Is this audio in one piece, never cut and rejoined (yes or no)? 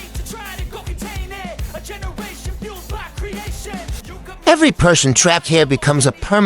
no